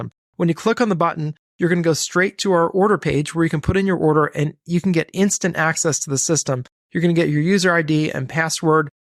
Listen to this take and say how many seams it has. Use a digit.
0